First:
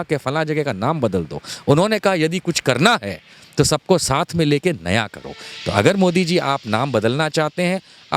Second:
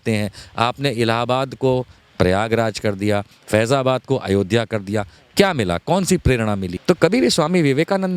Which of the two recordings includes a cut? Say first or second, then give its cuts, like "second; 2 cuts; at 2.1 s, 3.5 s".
second; 1 cut; at 6.7 s